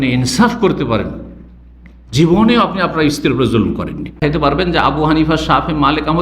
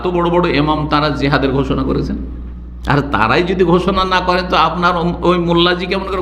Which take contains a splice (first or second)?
first